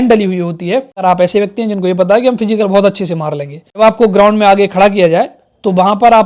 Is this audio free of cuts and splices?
no; 2 cuts; at 0.9 s, 3.7 s

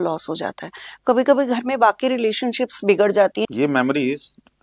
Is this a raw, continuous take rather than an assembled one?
no; 1 cut; at 3.4 s

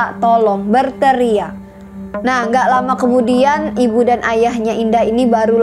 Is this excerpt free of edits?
yes; 0 cuts

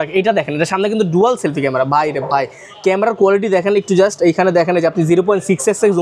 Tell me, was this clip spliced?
no; 0 cuts

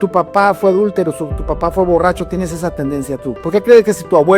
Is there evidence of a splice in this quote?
yes; 1 cut; at 3.3 s

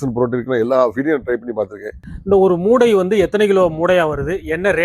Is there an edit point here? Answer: yes; 1 cut; at 2.1 s

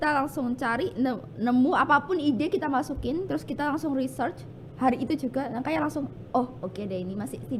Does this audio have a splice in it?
no; 0 cuts

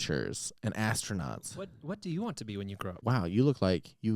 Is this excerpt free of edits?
no; 1 cut; at 3.0 s

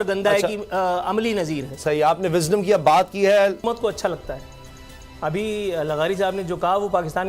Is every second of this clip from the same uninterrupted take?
yes; 0 cuts

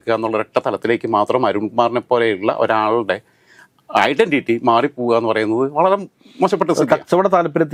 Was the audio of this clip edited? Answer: no; 0 cuts

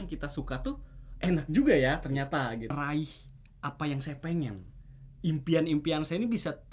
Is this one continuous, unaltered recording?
no; 1 cut; at 2.8 s

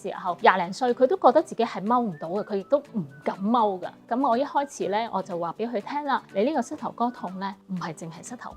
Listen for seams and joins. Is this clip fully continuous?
no; 3 cuts; at 4.0 s, 6.3 s, 7.6 s

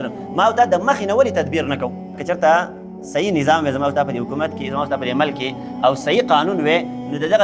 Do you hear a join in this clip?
yes; 1 cut; at 2.2 s

